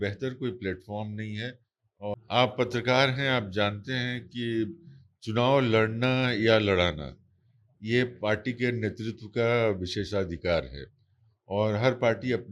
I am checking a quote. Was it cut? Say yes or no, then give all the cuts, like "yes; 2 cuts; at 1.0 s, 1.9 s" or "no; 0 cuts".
yes; 1 cut; at 2.1 s